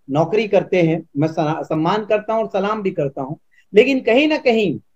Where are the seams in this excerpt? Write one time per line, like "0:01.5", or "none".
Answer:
0:01.6